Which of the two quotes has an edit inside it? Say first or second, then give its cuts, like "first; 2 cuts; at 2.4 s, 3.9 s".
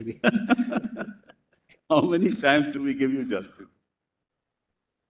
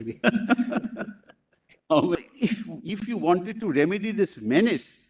second; 1 cut; at 2.2 s